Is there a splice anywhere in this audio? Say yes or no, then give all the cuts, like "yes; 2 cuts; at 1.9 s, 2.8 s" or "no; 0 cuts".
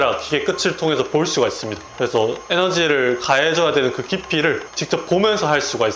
no; 0 cuts